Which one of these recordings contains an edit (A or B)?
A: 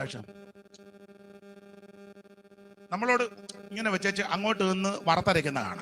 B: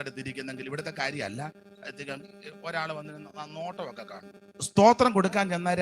B